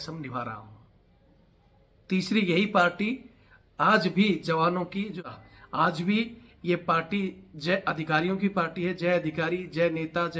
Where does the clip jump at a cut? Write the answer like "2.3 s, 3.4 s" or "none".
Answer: 5.2 s